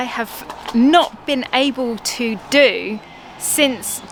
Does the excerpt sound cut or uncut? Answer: uncut